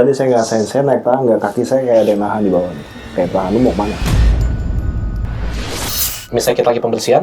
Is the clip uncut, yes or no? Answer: no